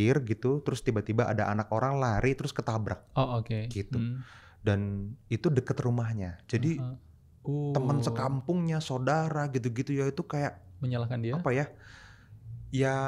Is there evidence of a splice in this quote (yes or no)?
no